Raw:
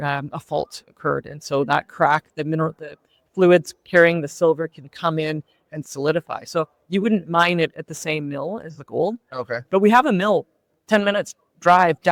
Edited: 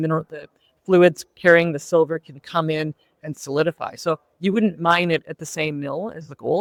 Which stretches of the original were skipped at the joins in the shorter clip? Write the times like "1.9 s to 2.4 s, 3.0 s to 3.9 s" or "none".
none